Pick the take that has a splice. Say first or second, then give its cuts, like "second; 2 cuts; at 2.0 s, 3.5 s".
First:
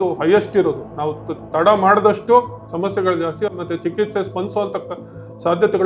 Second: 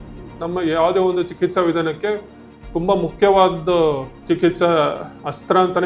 first; 1 cut; at 2.6 s